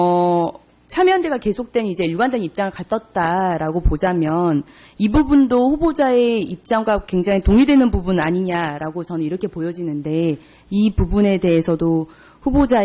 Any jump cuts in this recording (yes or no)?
yes